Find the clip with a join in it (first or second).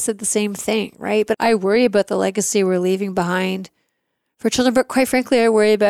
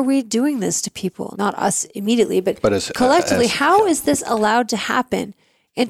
first